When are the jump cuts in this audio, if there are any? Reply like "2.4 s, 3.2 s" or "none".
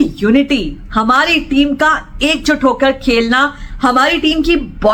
none